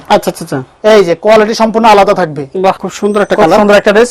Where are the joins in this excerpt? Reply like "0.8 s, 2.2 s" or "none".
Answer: 2.9 s